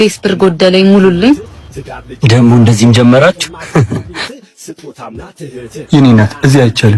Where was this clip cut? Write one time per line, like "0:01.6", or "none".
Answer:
none